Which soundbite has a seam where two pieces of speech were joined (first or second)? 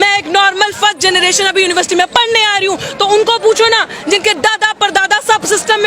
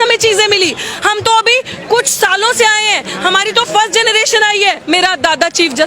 second